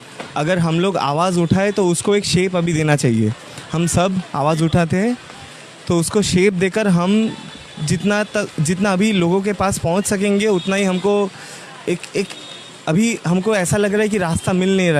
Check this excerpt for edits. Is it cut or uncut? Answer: uncut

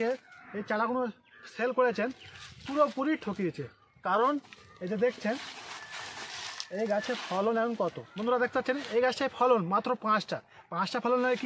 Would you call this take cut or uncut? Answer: uncut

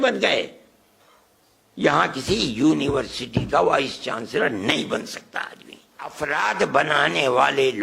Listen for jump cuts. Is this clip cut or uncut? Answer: cut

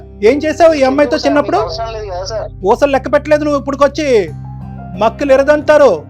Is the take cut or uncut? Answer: cut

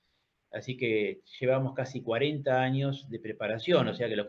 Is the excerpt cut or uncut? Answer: uncut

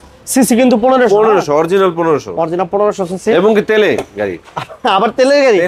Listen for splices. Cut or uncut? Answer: uncut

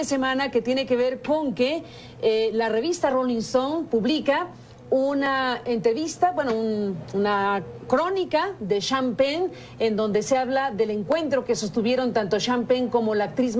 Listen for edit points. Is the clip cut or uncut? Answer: cut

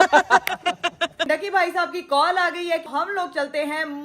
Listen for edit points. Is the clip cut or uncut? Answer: cut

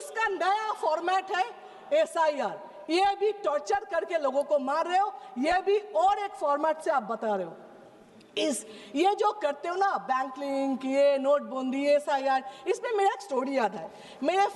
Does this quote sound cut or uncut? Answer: uncut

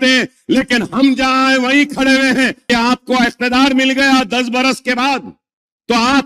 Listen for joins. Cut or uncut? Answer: cut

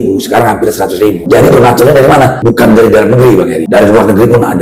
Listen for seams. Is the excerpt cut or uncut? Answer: cut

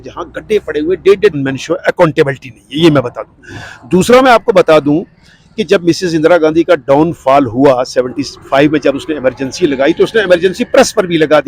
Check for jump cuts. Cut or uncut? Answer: cut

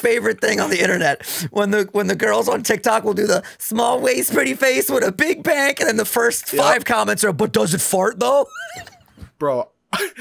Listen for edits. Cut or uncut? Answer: uncut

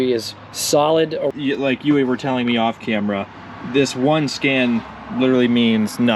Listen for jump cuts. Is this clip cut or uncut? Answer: cut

